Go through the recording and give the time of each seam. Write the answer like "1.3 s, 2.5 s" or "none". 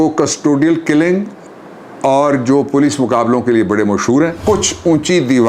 4.4 s